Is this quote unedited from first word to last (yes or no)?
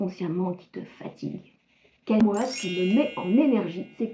no